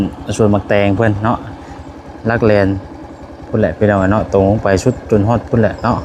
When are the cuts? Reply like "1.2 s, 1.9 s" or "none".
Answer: none